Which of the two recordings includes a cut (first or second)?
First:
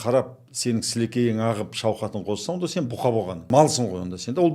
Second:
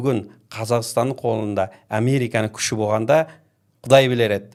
first